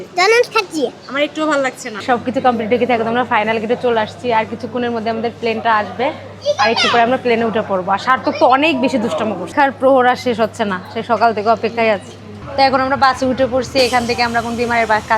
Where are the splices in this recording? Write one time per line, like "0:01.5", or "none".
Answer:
0:02.0
0:09.5
0:12.4